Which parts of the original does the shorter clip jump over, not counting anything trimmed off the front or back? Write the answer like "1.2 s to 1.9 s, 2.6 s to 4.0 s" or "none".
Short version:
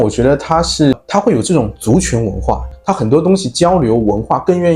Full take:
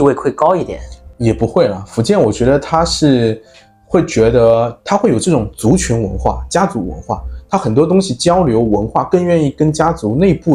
3.2 s to 4.7 s, 6.4 s to 7.3 s